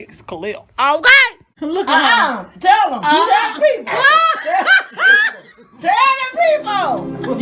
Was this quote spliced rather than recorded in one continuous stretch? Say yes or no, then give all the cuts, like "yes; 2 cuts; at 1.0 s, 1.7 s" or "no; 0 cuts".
yes; 1 cut; at 1.5 s